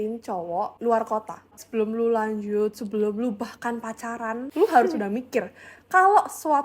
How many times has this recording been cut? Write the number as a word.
two